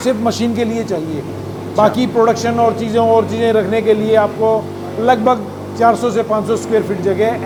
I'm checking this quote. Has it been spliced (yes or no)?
no